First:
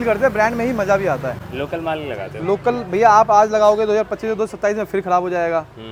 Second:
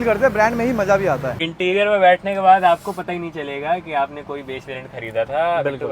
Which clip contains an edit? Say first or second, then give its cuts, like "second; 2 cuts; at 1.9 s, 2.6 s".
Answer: second; 1 cut; at 1.4 s